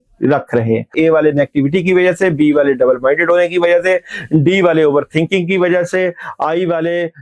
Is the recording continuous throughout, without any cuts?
no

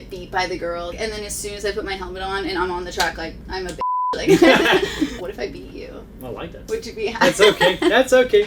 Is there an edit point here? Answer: yes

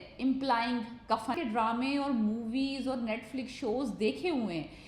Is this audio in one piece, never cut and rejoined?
no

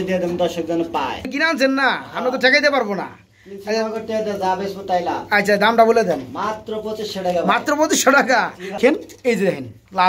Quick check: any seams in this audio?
yes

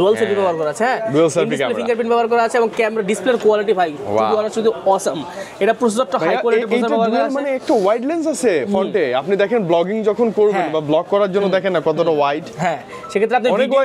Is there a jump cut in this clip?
no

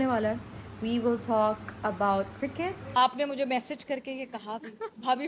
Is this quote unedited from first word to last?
no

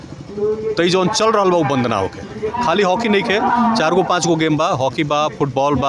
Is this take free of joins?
no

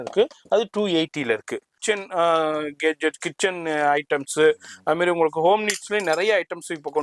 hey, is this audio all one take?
no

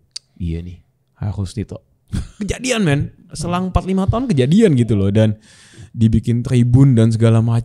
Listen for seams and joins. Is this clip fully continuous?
yes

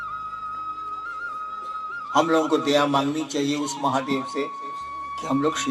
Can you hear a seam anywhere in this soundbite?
yes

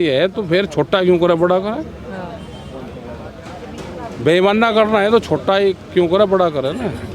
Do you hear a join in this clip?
no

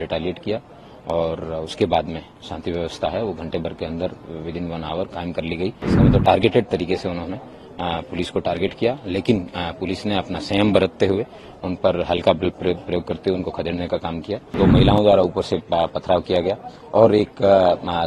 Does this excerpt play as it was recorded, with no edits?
no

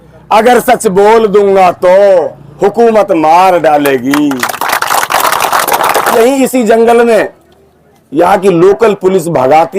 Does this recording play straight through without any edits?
no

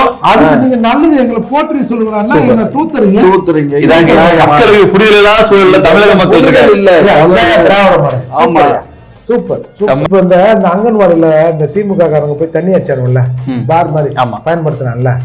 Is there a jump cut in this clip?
yes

